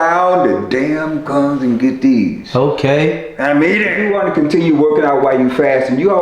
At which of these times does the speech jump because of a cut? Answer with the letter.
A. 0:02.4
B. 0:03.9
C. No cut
B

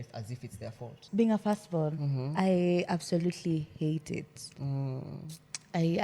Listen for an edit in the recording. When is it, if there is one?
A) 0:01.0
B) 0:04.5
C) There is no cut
A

